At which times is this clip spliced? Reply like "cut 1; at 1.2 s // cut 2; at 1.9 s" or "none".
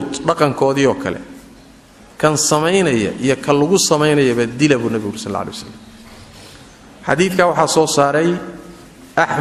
none